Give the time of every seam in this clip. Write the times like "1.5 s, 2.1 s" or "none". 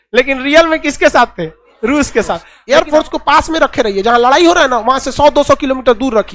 2.5 s